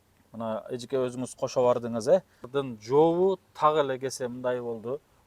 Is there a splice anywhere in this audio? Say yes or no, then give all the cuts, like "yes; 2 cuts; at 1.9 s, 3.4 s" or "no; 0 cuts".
yes; 1 cut; at 2.5 s